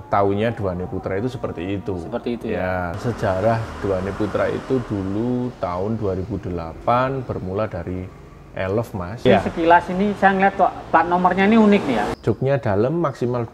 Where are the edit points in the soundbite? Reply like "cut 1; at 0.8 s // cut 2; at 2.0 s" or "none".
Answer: cut 1; at 3.0 s // cut 2; at 9.2 s // cut 3; at 12.1 s